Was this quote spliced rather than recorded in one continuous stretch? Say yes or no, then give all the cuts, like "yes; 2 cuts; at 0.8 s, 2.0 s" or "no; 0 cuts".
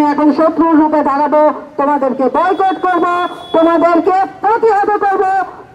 no; 0 cuts